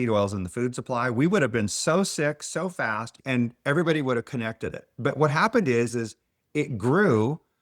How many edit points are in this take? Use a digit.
1